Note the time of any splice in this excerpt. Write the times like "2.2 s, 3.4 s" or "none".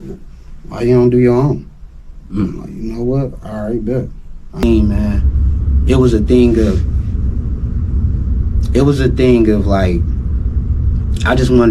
4.6 s